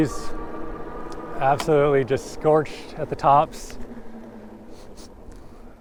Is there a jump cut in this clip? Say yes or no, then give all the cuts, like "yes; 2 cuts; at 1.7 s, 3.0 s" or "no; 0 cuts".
no; 0 cuts